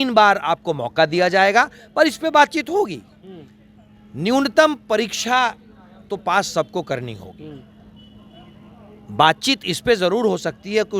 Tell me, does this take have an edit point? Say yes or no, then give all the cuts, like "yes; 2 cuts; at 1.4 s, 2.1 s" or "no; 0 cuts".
no; 0 cuts